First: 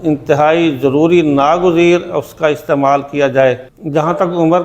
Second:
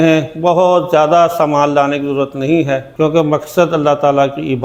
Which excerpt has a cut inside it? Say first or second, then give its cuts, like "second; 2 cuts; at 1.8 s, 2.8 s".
first; 1 cut; at 3.7 s